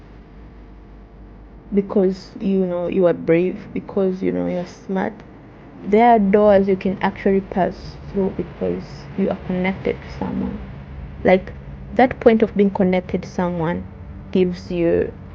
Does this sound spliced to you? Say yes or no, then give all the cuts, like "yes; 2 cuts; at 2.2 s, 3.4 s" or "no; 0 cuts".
no; 0 cuts